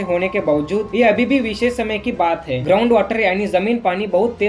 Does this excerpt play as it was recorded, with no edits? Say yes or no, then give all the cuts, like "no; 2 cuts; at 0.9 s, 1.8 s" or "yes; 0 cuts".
yes; 0 cuts